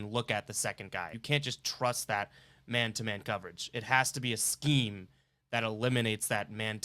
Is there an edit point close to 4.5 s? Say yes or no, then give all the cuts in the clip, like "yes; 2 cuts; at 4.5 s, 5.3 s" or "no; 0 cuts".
no; 1 cut; at 1.1 s